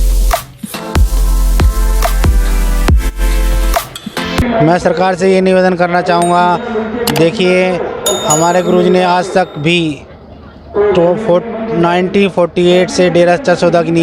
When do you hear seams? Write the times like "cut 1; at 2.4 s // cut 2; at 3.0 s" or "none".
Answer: cut 1; at 4.4 s